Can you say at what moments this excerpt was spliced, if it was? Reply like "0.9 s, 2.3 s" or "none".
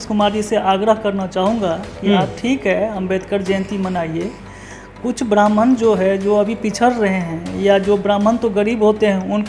none